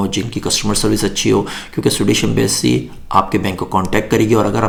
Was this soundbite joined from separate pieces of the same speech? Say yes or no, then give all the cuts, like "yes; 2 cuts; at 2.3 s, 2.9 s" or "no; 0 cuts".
no; 0 cuts